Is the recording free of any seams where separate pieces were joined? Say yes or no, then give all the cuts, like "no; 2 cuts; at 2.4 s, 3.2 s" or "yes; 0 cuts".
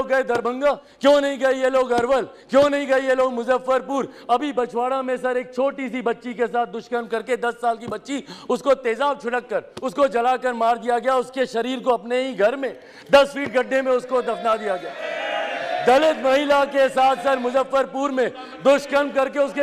no; 4 cuts; at 0.9 s, 2.4 s, 9.8 s, 15.0 s